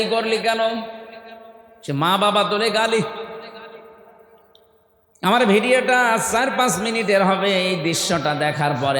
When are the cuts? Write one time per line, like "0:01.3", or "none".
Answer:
none